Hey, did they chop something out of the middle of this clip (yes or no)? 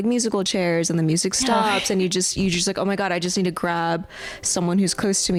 no